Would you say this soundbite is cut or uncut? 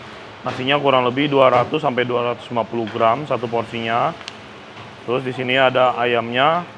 uncut